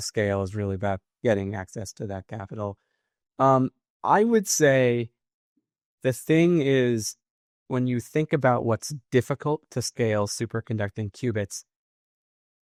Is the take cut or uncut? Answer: uncut